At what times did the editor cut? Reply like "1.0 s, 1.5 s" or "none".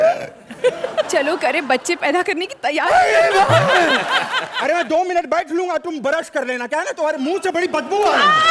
4.5 s